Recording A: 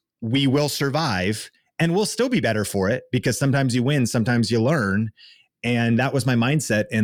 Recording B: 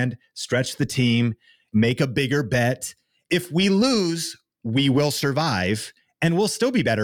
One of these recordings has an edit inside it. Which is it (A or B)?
B